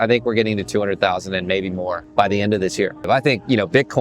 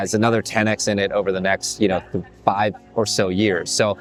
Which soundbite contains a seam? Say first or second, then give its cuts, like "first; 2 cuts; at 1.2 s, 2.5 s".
first; 2 cuts; at 2.0 s, 3.0 s